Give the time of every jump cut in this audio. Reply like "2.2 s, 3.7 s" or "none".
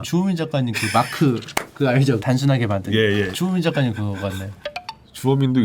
4.5 s